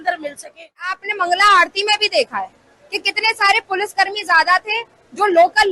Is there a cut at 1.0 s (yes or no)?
yes